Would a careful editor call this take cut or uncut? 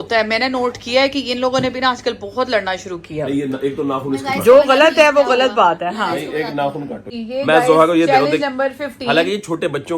cut